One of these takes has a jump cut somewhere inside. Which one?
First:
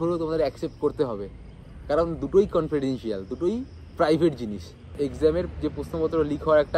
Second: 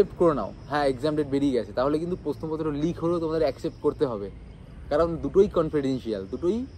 first; 1 cut; at 5.0 s

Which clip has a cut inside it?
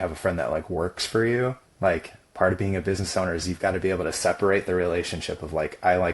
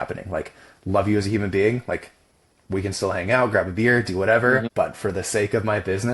second; 1 cut; at 4.7 s

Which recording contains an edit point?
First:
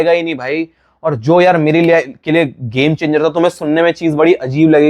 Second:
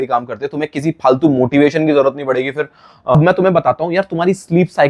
second; 1 cut; at 3.1 s

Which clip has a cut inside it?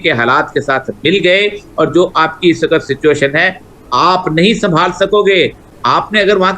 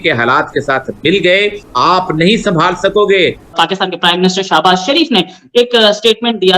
second; 2 cuts; at 1.6 s, 3.5 s

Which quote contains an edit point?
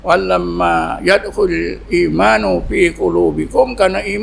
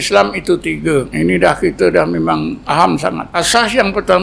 second; 3 cuts; at 1.1 s, 2.6 s, 3.3 s

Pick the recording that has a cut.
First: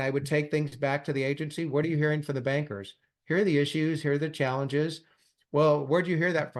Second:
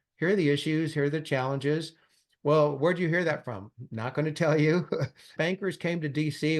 second; 1 cut; at 5.3 s

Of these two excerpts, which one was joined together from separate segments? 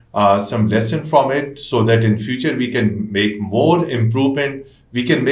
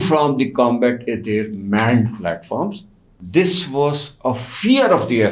second; 1 cut; at 3.1 s

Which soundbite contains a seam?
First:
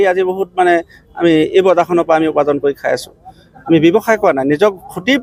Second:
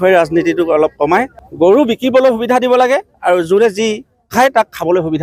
second; 1 cut; at 1.4 s

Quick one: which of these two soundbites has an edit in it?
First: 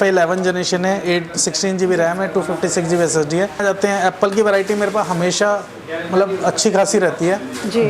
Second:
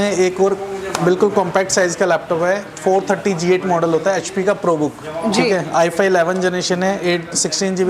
first; 1 cut; at 3.6 s

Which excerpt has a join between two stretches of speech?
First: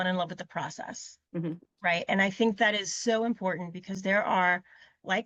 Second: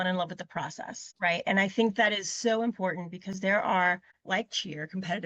second; 2 cuts; at 1.1 s, 4.1 s

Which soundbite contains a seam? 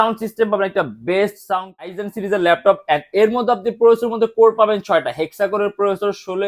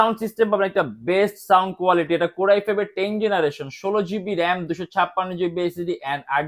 first; 1 cut; at 1.9 s

